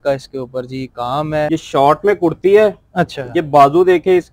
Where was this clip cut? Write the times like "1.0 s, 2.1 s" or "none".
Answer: 1.4 s